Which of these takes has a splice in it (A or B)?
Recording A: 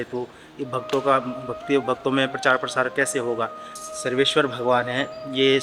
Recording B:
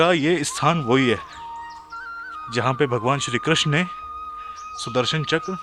A